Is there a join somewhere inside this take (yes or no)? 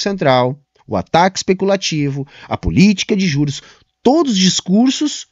no